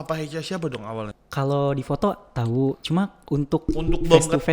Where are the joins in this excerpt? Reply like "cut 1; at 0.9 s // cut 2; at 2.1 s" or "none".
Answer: cut 1; at 1.2 s